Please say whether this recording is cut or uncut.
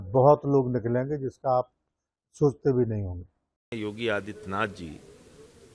cut